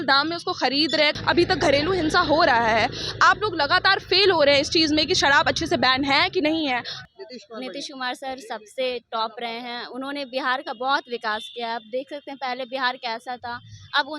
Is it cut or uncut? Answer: cut